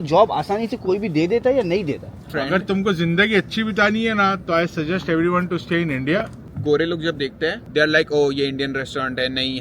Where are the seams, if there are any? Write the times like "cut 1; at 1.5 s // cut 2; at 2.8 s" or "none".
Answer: cut 1; at 2.3 s // cut 2; at 6.5 s